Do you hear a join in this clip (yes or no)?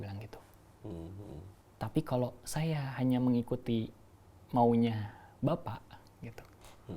no